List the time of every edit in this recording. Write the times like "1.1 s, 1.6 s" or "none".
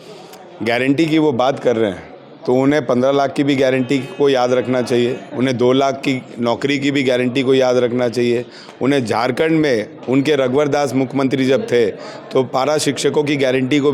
none